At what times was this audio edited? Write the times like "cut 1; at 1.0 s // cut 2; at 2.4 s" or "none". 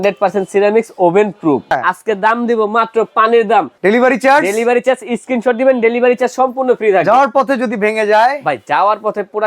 cut 1; at 1.8 s // cut 2; at 3.7 s